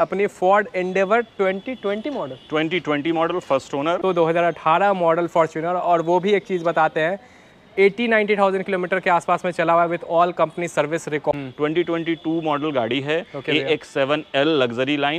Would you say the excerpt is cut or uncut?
cut